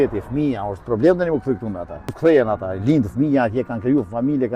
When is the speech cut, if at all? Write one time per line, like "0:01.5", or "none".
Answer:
0:02.1